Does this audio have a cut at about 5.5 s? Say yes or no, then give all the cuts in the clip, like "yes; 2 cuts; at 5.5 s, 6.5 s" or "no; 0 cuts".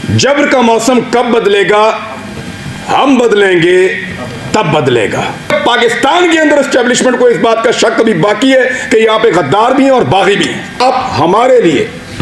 yes; 2 cuts; at 5.5 s, 10.8 s